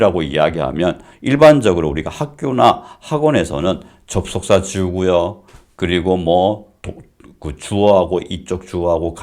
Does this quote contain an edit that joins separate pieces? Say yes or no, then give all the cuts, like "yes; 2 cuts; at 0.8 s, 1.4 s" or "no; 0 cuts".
no; 0 cuts